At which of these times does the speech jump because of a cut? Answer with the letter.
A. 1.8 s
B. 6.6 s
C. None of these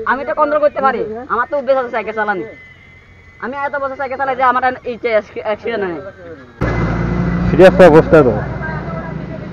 B